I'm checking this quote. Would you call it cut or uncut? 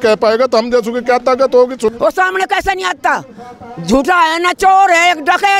cut